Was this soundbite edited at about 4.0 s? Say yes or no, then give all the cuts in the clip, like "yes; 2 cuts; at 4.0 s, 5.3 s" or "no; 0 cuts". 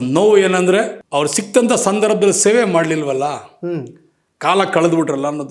no; 1 cut; at 1.0 s